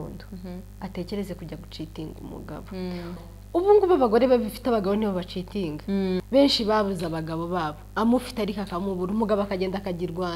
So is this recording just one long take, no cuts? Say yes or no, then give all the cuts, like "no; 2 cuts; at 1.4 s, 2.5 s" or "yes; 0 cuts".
no; 2 cuts; at 3.2 s, 6.2 s